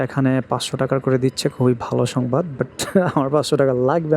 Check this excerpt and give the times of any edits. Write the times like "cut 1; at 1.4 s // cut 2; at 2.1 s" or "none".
none